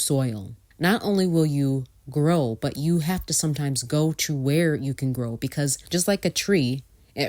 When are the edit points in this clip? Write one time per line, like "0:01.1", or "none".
none